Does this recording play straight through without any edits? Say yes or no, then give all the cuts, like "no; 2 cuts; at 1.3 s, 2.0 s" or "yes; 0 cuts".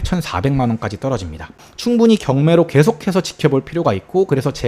no; 1 cut; at 1.7 s